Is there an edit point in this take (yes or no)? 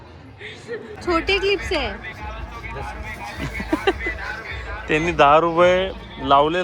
yes